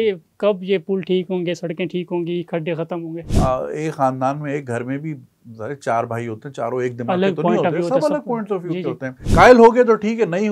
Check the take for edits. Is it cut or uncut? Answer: cut